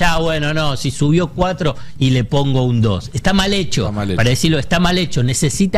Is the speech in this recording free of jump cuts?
yes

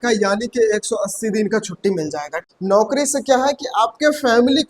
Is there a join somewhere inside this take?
yes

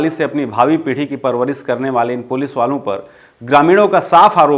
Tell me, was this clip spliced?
no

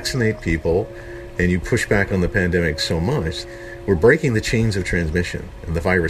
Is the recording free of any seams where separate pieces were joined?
no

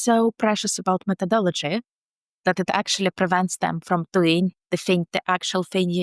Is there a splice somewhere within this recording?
no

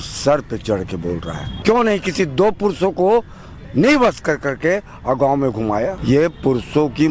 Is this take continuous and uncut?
no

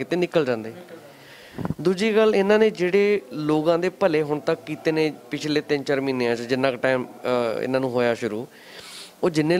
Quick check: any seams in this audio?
no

